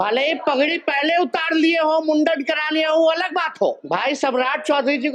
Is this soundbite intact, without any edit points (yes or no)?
no